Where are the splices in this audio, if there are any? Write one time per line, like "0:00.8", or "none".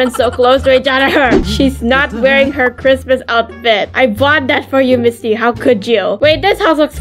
0:01.4